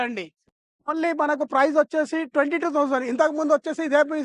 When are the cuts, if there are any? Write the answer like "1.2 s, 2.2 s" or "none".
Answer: 0.9 s

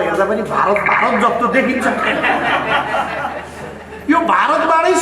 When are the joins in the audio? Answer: none

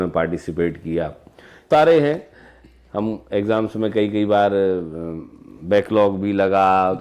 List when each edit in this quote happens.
1.7 s

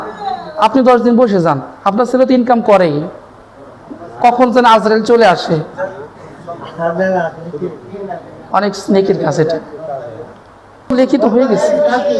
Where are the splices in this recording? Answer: 10.9 s

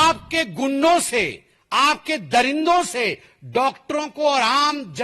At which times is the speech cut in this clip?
none

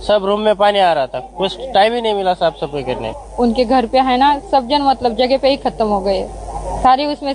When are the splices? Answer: 3.1 s

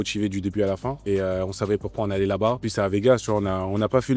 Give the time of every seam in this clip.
0.9 s, 2.6 s

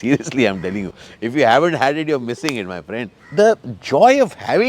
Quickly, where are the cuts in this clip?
3.2 s

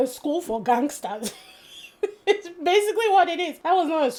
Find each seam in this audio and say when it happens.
none

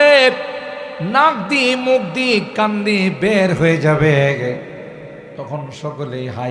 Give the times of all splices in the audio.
5.3 s

